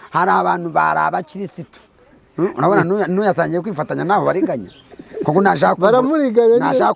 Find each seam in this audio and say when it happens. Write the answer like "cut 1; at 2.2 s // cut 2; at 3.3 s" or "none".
none